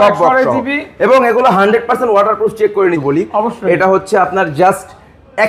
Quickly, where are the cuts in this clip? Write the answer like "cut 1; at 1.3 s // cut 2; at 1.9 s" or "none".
cut 1; at 3.0 s